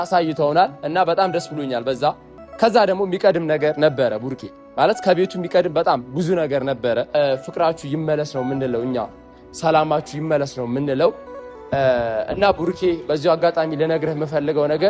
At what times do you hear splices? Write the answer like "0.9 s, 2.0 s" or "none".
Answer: 2.3 s, 7.1 s